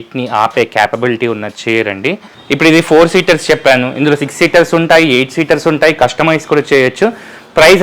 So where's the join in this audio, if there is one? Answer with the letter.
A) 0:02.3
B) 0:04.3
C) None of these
A